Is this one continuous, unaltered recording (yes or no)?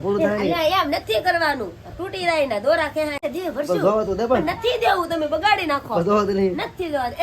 no